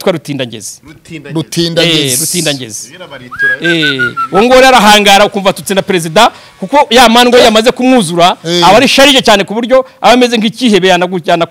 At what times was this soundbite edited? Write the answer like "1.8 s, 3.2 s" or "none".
none